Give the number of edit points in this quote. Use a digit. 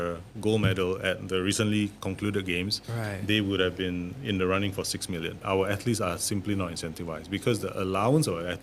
2